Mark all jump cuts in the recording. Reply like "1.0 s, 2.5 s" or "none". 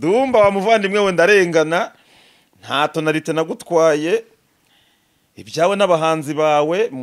none